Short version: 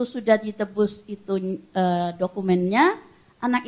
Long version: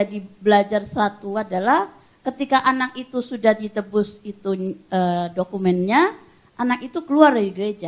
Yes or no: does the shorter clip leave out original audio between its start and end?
no